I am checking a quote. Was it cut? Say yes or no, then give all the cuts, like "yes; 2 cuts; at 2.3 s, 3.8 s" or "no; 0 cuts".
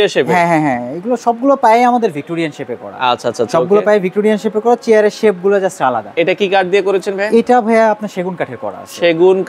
no; 0 cuts